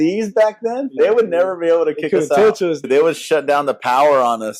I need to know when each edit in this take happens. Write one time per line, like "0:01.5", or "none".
0:00.9
0:02.8